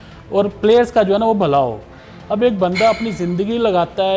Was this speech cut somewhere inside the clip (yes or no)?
no